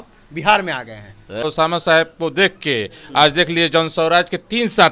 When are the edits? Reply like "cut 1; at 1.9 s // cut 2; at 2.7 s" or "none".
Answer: cut 1; at 1.4 s